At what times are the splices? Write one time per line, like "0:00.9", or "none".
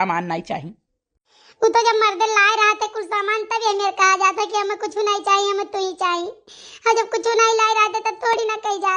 none